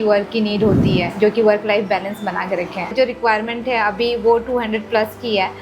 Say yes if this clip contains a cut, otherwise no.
yes